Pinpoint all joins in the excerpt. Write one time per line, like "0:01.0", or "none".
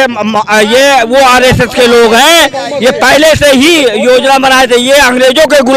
none